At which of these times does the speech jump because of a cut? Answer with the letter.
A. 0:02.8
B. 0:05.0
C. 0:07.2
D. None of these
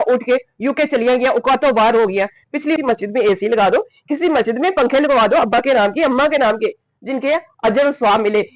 A